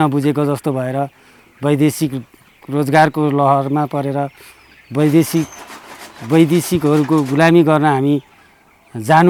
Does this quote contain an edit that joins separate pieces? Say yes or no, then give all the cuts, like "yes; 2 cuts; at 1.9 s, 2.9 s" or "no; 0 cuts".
no; 0 cuts